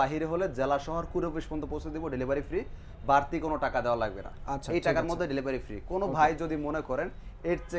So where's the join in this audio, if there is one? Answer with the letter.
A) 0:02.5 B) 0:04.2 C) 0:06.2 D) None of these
D